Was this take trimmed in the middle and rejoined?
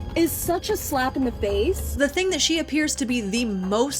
yes; 1 cut; at 2.0 s

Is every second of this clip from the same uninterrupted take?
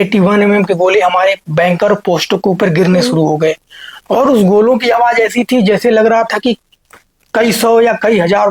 yes; 0 cuts

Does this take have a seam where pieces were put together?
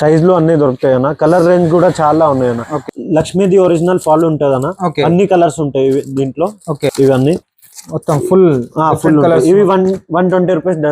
yes; 1 cut; at 2.8 s

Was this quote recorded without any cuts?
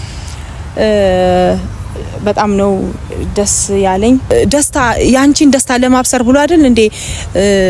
no; 1 cut; at 4.2 s

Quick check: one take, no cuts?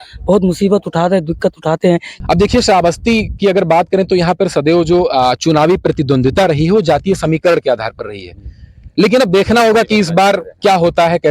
no; 1 cut; at 2.1 s

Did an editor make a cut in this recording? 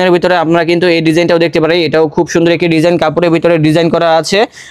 no; 0 cuts

